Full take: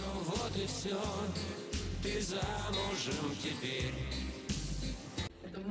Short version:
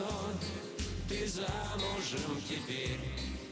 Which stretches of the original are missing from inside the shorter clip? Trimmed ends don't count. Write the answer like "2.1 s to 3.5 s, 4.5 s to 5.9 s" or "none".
none